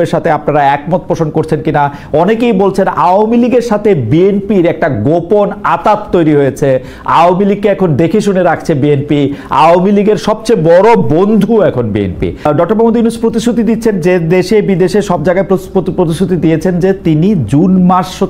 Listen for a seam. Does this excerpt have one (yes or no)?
yes